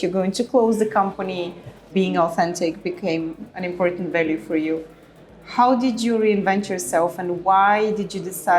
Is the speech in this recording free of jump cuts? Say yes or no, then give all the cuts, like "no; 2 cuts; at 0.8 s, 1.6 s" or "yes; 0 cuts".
no; 2 cuts; at 1.9 s, 3.5 s